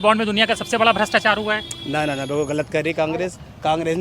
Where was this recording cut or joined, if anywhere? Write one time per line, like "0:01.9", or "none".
none